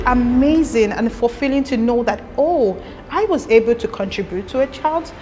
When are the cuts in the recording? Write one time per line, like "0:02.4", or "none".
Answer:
none